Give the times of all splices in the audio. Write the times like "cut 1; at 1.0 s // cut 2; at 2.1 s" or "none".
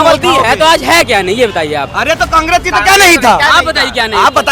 none

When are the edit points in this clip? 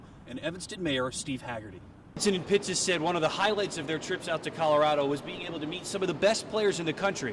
cut 1; at 2.2 s

